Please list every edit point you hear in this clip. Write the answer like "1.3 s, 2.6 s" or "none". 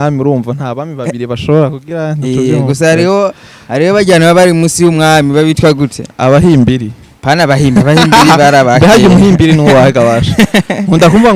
none